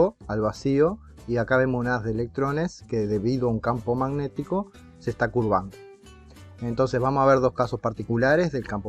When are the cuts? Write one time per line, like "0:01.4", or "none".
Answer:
none